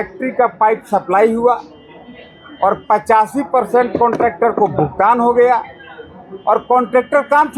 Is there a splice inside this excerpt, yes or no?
no